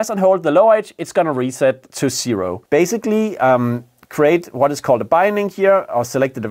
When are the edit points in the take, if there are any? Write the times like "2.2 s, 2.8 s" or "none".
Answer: 2.6 s